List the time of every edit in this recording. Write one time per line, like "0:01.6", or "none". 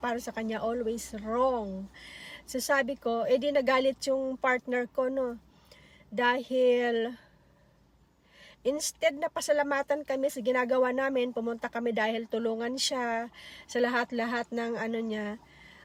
none